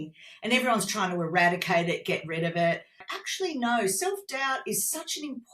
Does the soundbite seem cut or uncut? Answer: cut